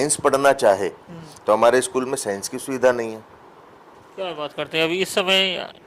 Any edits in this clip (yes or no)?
no